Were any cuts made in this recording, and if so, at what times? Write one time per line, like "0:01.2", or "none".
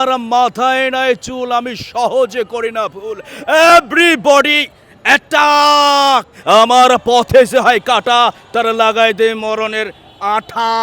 0:06.3